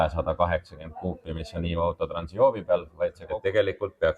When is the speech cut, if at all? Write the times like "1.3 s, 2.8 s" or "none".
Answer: 3.2 s